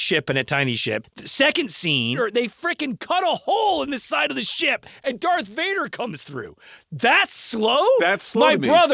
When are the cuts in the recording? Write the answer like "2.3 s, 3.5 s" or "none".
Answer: 1.1 s, 2.2 s